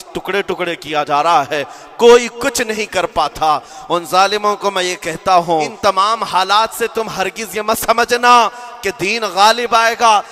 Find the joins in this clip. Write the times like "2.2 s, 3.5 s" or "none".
5.7 s

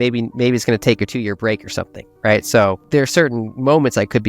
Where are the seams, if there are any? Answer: 2.8 s

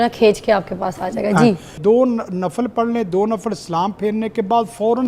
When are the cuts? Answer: 1.8 s

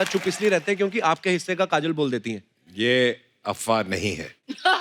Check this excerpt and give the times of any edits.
none

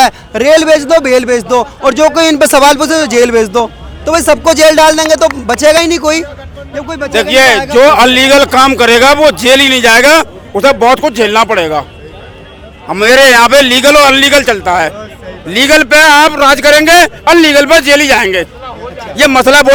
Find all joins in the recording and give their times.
none

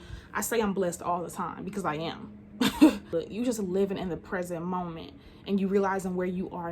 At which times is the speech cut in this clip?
3.1 s

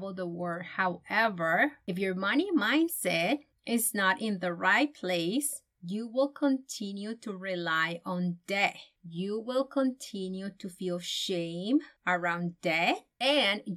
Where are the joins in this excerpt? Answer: 8.9 s

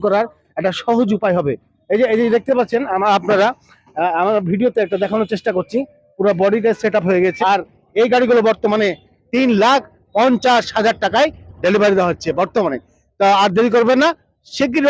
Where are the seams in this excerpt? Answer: 7.3 s

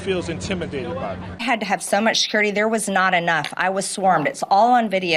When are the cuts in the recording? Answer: 1.3 s

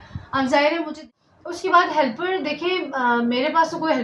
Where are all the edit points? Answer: 1.0 s

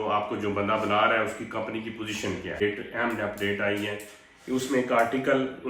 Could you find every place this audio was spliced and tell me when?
2.6 s

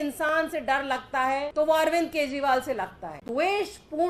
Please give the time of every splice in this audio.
1.5 s, 3.2 s

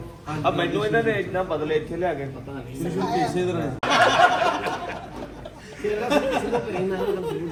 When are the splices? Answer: none

